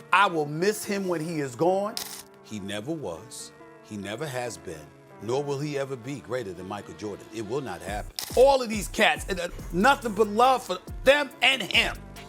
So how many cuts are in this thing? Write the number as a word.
two